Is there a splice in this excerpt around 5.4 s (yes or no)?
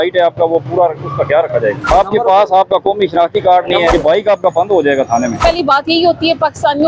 yes